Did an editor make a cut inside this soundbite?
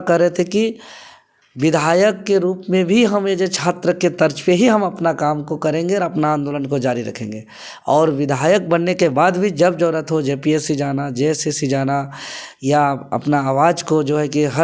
no; 0 cuts

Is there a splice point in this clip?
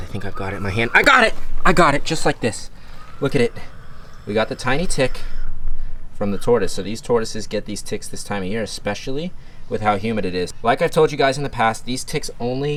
no; 0 cuts

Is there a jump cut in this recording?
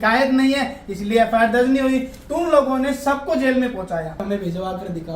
yes; 1 cut; at 4.2 s

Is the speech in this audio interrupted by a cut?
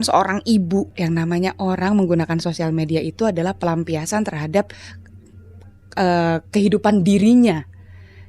yes; 1 cut; at 0.9 s

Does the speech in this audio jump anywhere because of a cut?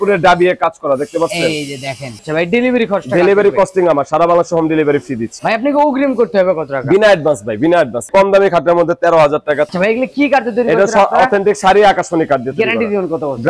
yes; 4 cuts; at 2.0 s, 5.3 s, 8.1 s, 9.7 s

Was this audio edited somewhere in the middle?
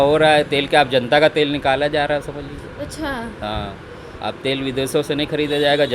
no; 0 cuts

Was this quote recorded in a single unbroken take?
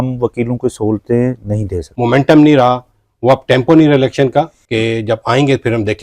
no; 2 cuts; at 1.8 s, 4.6 s

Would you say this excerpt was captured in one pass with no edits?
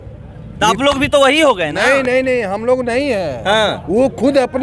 yes; 0 cuts

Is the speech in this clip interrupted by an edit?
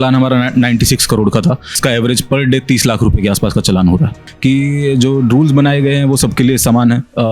yes; 2 cuts; at 1.8 s, 4.3 s

